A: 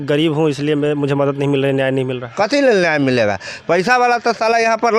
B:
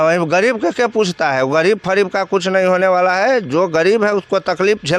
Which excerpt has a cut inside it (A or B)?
A